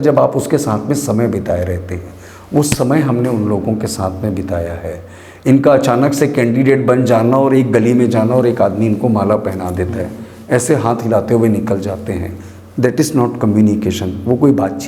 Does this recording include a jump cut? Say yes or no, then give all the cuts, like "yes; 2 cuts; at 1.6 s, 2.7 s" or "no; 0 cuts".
no; 0 cuts